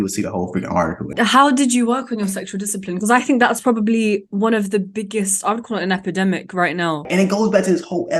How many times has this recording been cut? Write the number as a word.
two